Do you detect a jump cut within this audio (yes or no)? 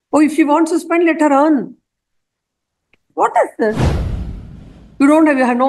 yes